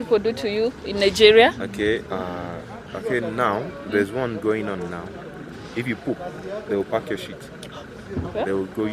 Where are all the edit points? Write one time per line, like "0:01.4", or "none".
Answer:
none